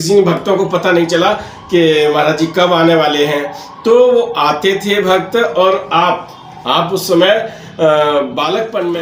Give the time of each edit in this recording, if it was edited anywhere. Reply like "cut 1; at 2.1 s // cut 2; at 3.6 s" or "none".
none